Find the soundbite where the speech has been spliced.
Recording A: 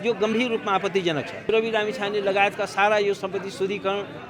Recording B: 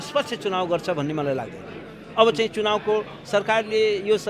A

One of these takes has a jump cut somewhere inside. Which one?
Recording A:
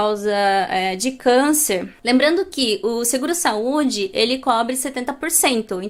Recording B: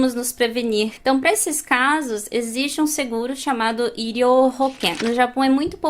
B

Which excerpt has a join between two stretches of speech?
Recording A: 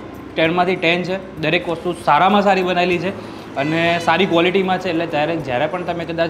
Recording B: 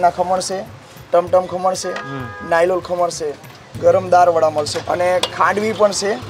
B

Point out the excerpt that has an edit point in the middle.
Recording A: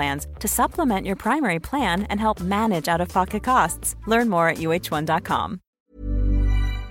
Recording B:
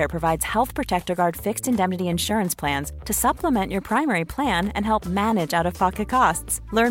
A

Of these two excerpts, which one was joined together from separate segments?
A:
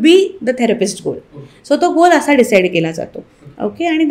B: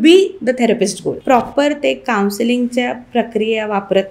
B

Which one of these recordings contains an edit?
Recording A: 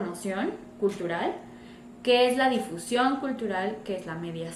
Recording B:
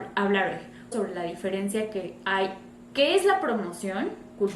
B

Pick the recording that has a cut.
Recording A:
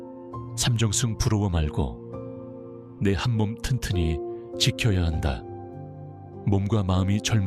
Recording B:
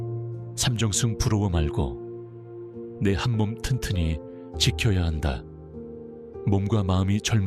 B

